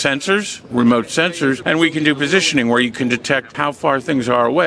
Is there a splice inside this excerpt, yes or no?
yes